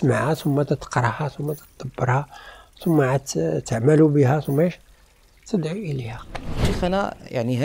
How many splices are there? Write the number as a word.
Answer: one